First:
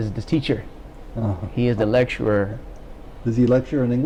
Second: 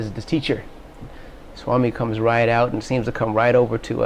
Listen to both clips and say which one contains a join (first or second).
second